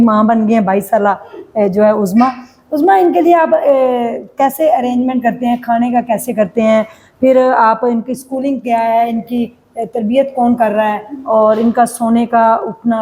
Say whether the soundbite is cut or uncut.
uncut